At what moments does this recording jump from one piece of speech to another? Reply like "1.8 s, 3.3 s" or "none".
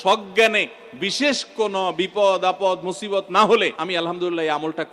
3.8 s